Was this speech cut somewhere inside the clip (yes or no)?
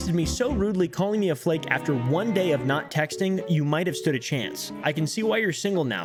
no